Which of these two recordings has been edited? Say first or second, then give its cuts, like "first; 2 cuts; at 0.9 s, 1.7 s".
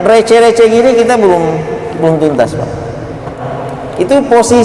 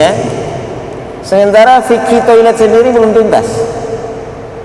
first; 1 cut; at 3.4 s